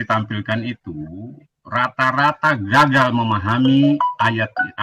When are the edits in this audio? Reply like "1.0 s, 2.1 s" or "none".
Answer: none